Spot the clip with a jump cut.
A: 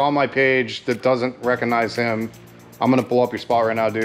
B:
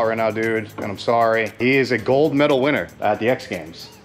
B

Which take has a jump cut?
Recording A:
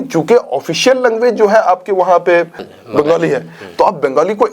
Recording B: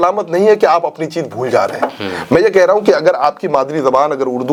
A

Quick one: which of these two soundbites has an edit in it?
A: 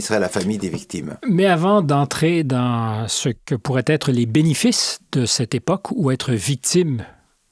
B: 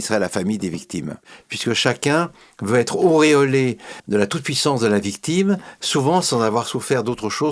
B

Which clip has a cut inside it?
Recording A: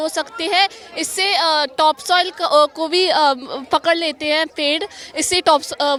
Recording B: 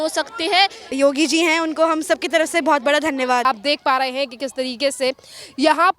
B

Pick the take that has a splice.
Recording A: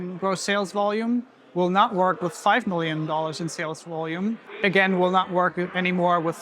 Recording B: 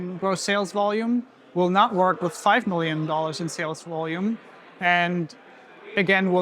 A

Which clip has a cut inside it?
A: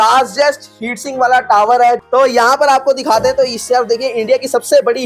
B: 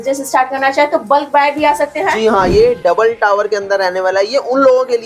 B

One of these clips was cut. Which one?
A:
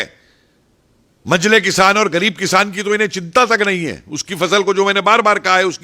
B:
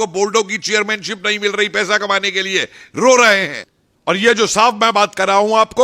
B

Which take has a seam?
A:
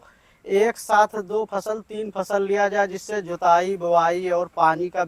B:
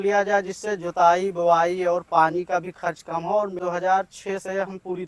B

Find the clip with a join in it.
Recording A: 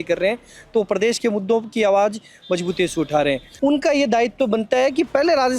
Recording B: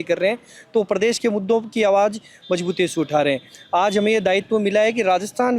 A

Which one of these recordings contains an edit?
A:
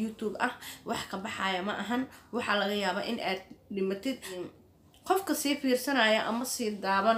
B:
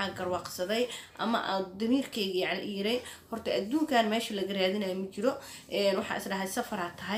A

